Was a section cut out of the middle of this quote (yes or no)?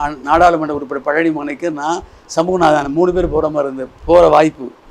no